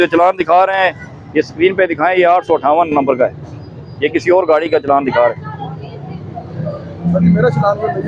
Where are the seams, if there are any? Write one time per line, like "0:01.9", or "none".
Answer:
none